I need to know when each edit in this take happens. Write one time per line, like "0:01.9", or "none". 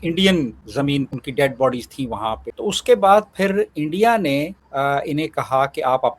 0:01.1
0:02.5